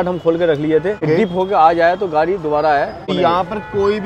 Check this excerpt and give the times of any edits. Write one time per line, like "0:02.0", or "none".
0:01.0
0:03.1